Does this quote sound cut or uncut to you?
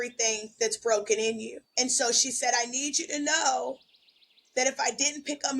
cut